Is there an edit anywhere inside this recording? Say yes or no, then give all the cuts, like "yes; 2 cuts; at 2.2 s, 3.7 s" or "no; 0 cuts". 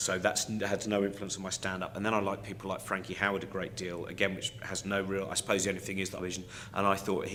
no; 0 cuts